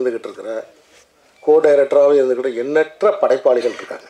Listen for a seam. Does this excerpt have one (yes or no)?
no